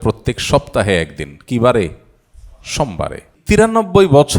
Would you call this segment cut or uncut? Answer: cut